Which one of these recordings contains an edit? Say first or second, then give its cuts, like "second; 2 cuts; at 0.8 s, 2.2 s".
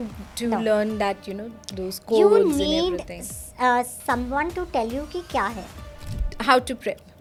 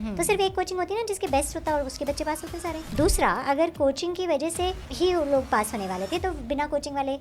second; 2 cuts; at 2.9 s, 4.8 s